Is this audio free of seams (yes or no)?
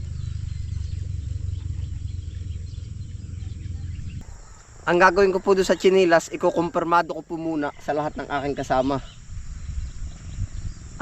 no